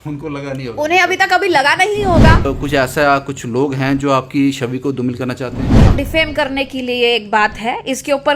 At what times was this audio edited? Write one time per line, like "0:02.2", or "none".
0:02.4
0:05.9